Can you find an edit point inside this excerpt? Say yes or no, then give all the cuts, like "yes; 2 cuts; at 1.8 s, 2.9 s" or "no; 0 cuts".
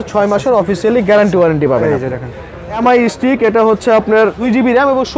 yes; 2 cuts; at 2.8 s, 4.4 s